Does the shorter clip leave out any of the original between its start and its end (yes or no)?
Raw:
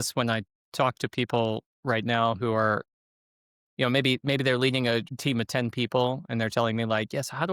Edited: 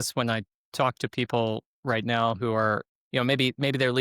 yes